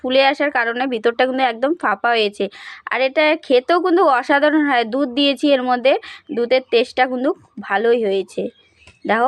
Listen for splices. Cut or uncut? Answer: uncut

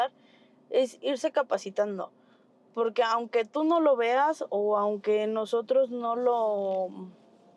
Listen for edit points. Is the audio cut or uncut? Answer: uncut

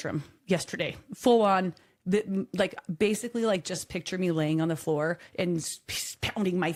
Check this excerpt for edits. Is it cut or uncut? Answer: uncut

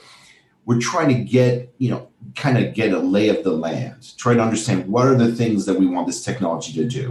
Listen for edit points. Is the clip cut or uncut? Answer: uncut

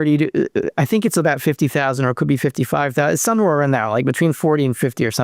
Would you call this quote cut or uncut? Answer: uncut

